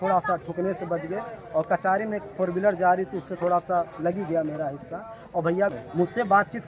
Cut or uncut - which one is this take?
cut